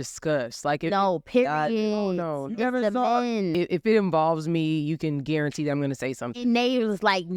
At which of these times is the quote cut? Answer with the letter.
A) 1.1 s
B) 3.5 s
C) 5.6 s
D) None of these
B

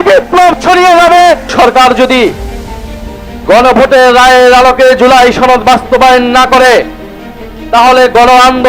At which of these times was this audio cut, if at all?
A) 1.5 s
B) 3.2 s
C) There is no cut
A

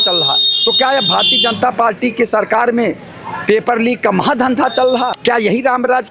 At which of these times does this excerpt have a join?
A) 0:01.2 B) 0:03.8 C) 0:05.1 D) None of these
C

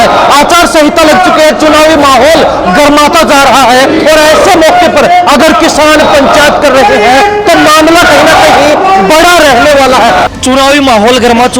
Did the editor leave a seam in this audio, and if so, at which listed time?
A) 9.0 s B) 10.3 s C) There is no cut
B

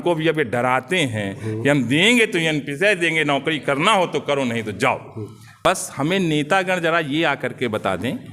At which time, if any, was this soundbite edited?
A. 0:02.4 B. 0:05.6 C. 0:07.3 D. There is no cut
B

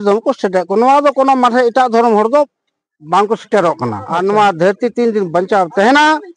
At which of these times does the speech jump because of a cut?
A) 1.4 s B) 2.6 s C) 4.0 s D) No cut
C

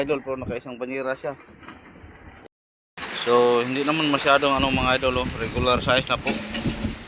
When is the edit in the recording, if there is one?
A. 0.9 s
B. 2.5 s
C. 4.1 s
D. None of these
B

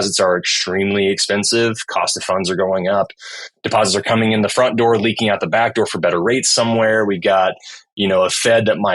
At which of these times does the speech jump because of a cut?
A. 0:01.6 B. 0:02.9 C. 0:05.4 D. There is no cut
D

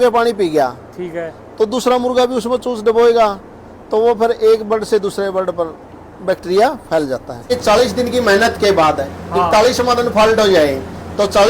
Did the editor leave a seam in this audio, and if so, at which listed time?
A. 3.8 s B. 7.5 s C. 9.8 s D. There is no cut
B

